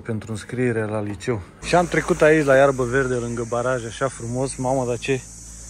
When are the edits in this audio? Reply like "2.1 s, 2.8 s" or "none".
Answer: 1.5 s